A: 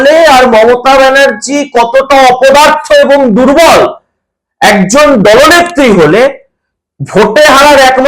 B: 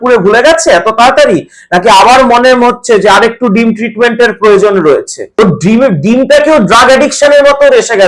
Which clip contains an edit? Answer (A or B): B